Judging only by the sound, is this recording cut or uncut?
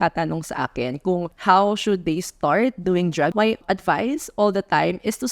cut